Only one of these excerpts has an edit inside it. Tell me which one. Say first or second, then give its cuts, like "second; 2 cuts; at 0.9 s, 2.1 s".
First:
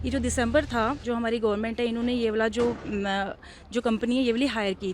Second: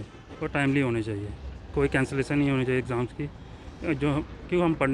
first; 1 cut; at 1.0 s